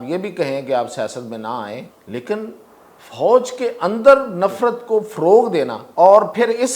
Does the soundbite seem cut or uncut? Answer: cut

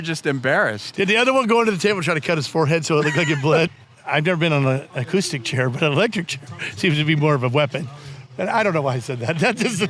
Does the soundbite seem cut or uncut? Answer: cut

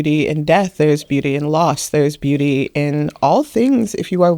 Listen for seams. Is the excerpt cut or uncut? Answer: uncut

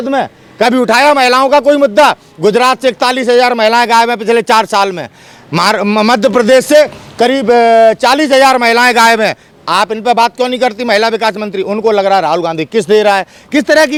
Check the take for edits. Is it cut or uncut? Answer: uncut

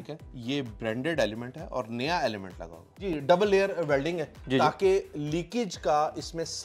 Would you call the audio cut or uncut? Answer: cut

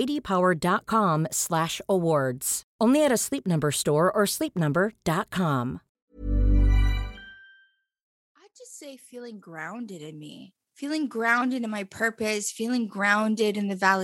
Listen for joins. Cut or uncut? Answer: cut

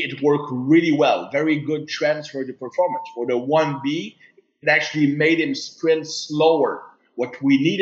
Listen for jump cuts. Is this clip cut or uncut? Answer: uncut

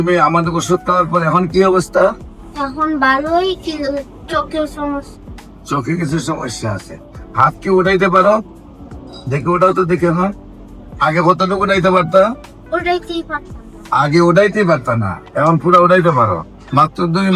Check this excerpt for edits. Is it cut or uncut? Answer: uncut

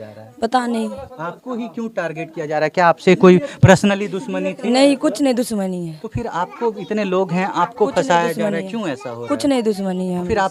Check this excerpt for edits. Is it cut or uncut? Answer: uncut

